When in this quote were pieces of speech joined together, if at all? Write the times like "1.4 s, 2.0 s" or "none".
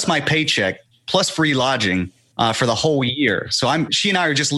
2.2 s